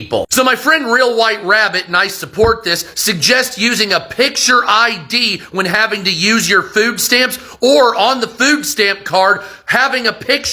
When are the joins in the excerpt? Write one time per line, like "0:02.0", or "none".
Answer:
none